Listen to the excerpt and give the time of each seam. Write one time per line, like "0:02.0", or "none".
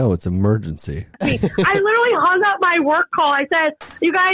0:01.1